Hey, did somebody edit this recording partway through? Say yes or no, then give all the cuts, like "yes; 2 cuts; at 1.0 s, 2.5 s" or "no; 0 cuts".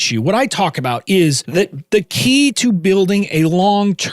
yes; 1 cut; at 1.4 s